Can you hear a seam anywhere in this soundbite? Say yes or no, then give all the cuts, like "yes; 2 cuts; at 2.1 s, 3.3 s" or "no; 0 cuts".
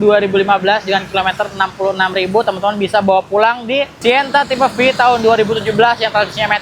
yes; 1 cut; at 3.9 s